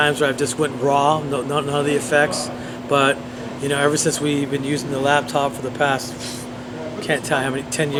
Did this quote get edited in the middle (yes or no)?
no